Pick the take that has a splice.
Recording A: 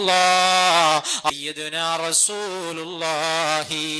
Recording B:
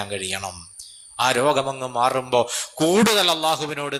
A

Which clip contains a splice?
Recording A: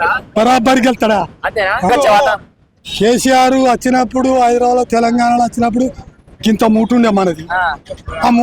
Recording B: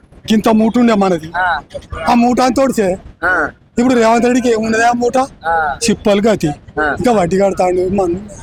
A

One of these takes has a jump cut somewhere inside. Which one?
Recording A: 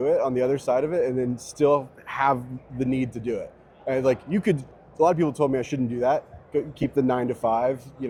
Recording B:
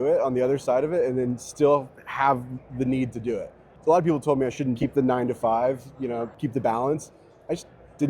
B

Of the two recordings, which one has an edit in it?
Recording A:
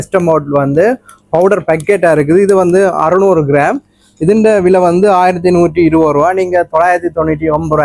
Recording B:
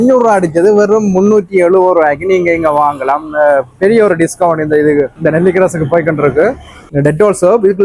B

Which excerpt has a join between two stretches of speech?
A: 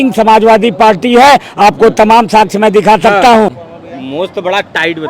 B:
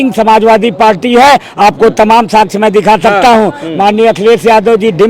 A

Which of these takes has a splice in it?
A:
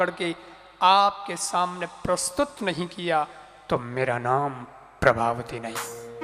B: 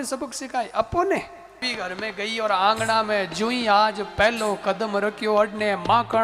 B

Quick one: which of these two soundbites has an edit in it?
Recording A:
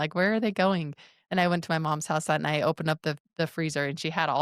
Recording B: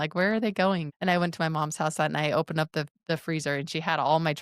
B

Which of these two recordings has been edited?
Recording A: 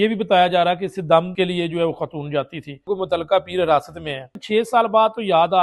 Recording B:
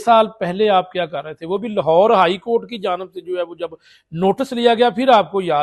A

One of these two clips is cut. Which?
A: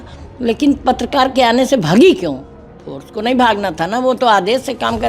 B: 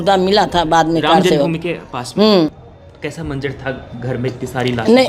B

